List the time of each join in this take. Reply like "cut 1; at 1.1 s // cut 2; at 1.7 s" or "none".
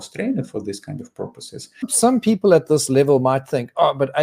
cut 1; at 1.9 s